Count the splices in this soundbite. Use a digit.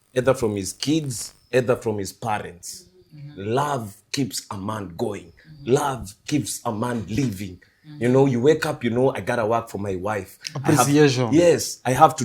0